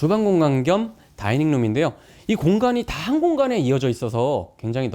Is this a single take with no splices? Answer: yes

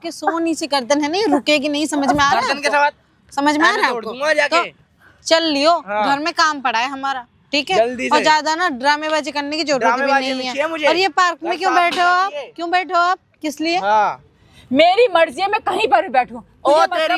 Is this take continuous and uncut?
yes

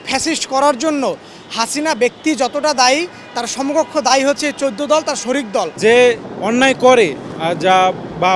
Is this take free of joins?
no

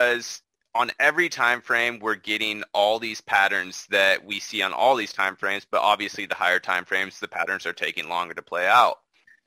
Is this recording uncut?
yes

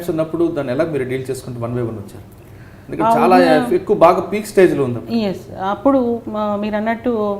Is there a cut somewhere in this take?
no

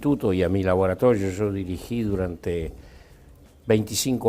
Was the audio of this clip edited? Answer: yes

